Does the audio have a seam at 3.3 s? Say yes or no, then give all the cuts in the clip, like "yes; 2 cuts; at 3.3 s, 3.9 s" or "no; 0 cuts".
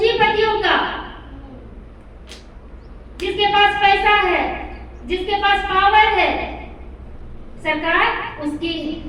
no; 0 cuts